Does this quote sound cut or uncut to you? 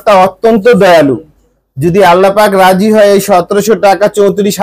uncut